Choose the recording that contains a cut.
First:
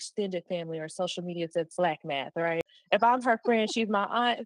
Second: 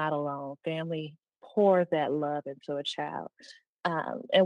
first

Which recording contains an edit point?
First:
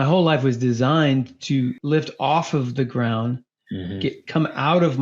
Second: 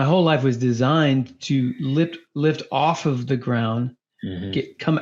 first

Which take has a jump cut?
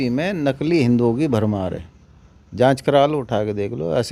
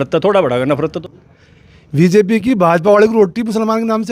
second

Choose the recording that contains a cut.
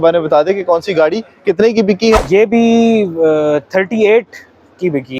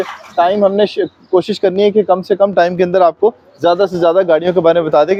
first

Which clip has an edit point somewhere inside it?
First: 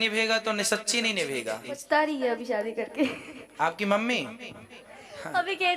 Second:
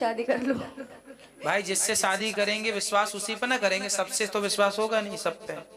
first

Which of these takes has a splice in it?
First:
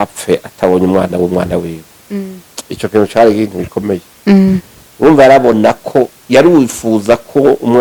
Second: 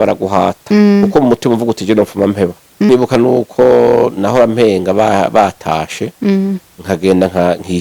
second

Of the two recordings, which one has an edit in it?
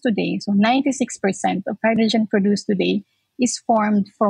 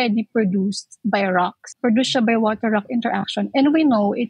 second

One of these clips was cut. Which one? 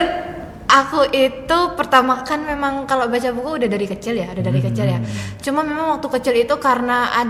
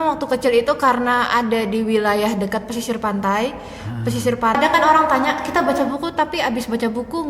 second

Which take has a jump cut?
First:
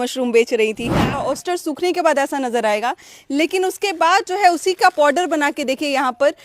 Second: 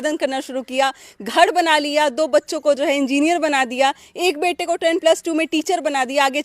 first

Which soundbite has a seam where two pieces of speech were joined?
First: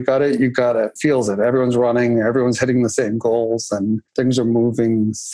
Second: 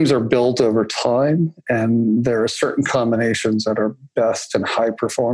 first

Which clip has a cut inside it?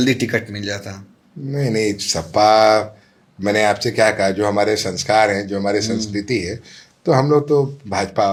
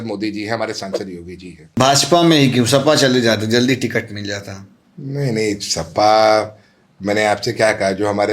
second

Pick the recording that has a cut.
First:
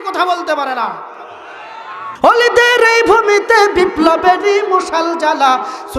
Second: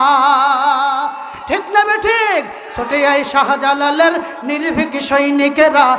first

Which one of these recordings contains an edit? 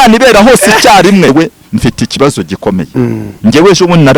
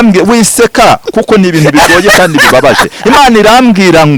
first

